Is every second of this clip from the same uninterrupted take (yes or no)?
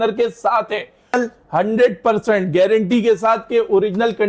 no